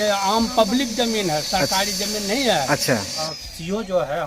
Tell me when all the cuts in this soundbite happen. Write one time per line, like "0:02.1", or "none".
0:03.2